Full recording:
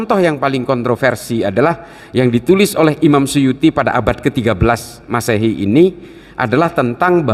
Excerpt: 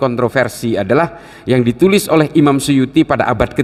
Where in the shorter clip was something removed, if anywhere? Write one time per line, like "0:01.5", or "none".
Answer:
none